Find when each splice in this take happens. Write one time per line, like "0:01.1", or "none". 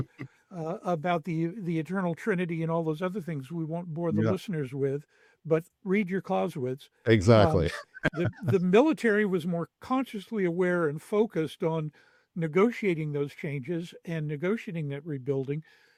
none